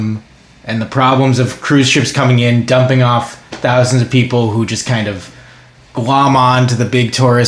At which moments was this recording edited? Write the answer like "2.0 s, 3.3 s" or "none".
none